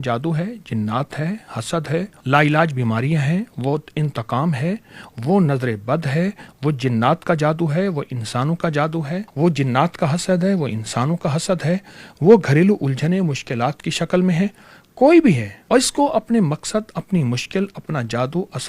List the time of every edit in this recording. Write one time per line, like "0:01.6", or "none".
0:02.2
0:09.3
0:15.5